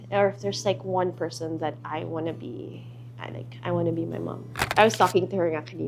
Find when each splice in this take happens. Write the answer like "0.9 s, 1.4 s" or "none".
4.7 s